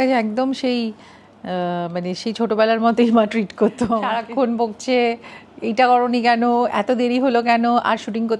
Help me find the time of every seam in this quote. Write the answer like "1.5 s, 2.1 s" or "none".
4.1 s